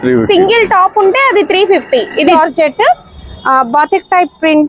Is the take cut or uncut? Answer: cut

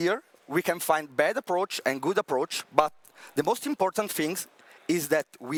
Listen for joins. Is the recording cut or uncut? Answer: uncut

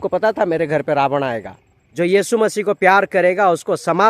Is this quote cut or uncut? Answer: cut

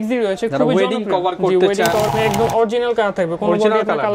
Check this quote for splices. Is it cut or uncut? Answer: cut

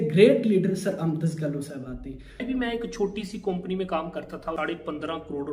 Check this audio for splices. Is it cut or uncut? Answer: cut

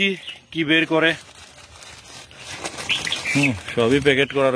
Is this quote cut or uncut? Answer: uncut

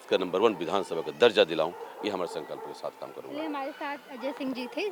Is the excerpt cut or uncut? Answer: uncut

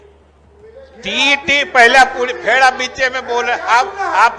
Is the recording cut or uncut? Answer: uncut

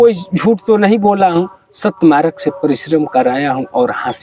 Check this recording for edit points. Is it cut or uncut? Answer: uncut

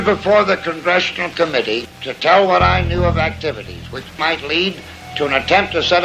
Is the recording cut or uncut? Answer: cut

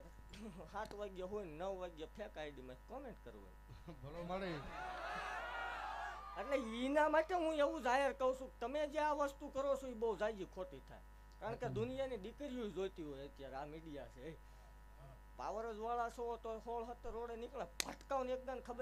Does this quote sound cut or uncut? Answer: uncut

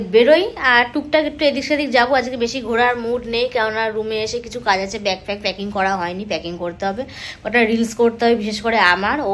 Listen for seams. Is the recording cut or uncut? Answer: uncut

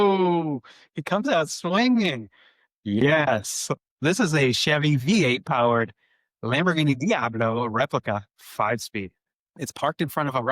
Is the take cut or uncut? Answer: cut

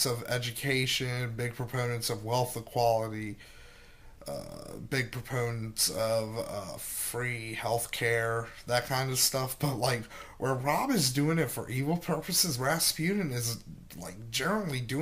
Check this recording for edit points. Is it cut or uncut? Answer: cut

